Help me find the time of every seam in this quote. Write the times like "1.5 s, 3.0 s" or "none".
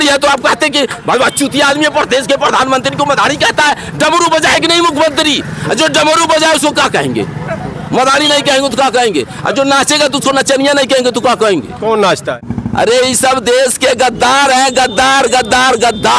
12.5 s